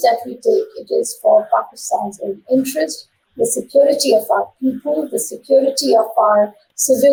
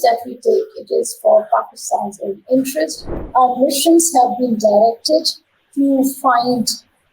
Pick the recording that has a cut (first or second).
second